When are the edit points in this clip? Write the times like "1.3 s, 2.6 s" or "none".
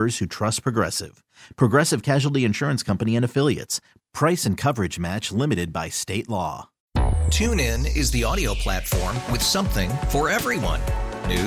6.7 s